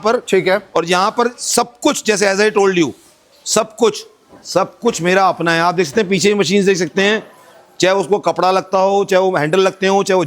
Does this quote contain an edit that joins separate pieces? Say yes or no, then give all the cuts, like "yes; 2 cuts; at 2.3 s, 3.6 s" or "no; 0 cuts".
no; 0 cuts